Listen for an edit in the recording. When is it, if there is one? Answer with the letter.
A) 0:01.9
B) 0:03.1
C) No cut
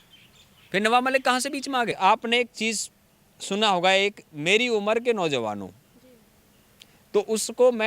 A